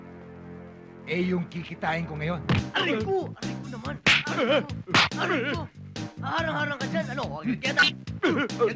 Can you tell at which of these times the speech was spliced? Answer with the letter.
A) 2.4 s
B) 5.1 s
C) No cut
A